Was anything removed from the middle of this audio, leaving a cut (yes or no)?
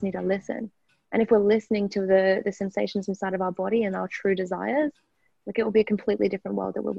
no